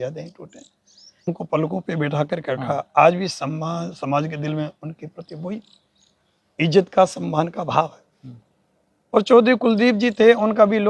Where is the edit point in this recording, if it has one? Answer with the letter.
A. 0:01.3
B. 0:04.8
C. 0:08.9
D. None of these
A